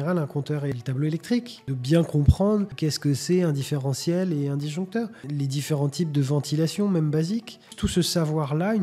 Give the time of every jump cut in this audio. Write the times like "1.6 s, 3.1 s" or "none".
0.7 s, 1.7 s, 2.7 s, 5.2 s, 7.7 s